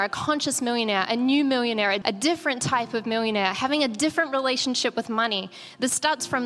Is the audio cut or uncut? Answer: cut